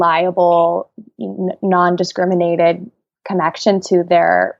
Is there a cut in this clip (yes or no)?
no